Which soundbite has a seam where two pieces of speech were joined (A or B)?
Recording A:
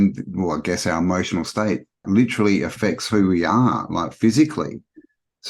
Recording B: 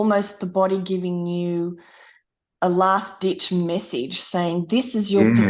A